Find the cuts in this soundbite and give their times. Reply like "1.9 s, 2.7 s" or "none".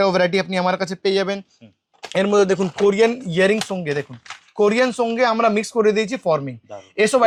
none